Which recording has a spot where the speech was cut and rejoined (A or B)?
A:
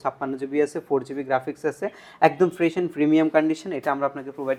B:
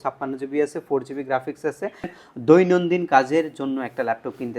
B